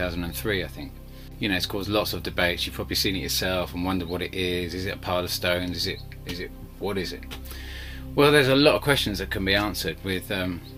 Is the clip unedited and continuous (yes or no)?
yes